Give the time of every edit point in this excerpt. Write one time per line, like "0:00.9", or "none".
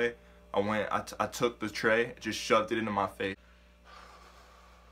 0:03.4